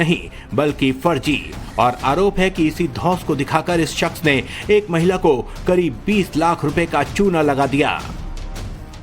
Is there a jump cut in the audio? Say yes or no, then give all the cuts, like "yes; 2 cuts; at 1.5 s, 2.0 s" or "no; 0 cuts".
yes; 1 cut; at 6.9 s